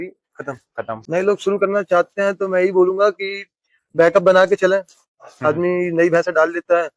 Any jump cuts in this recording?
yes; 1 cut; at 1.0 s

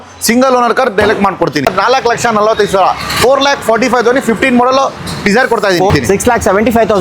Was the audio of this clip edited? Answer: yes; 2 cuts; at 1.7 s, 5.9 s

